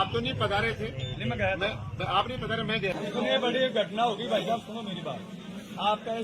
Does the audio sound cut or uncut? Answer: cut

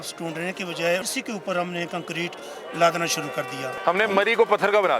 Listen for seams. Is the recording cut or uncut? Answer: cut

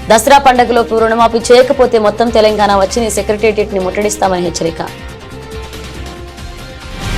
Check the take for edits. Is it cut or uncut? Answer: uncut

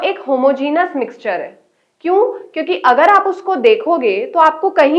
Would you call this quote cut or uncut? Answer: uncut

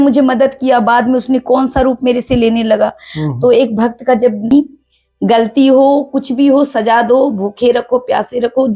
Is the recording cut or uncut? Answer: cut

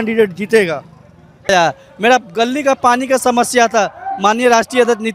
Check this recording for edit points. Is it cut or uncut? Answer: cut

